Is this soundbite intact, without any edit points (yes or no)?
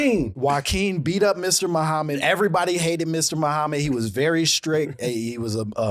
yes